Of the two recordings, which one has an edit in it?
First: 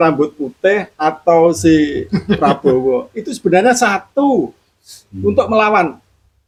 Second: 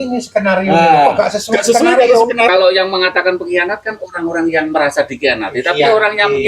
second; 1 cut; at 2.5 s

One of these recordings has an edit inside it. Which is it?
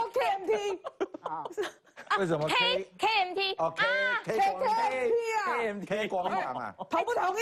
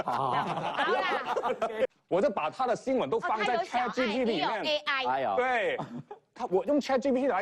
second; 1 cut; at 1.9 s

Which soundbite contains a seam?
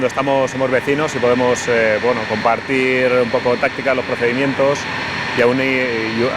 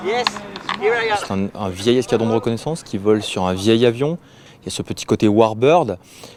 first; 1 cut; at 3.0 s

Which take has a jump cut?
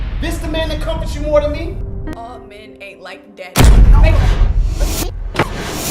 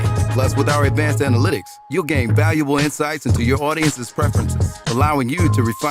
first; 1 cut; at 2.1 s

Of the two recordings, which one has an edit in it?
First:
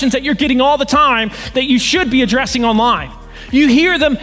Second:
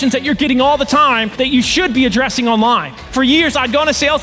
second; 2 cuts; at 1.3 s, 3.0 s

